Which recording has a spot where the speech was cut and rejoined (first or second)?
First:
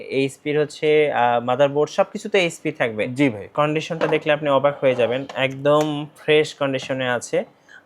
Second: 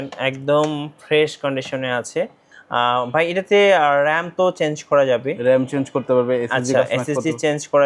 first